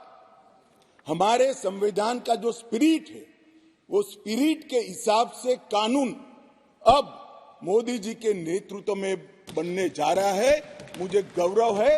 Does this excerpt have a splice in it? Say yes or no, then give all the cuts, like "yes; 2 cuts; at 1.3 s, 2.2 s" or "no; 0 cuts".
no; 0 cuts